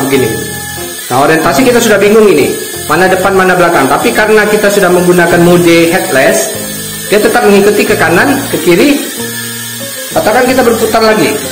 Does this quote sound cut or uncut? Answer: uncut